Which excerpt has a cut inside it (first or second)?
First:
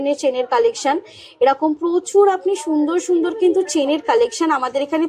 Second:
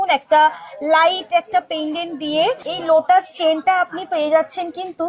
second